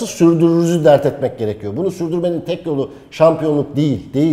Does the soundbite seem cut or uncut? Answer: uncut